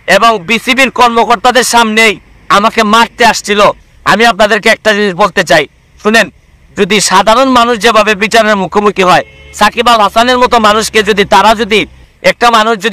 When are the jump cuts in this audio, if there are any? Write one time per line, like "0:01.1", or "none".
0:03.9
0:12.0